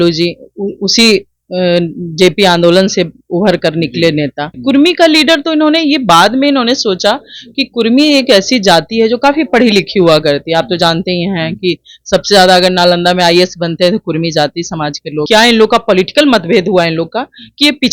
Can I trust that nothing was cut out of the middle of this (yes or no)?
no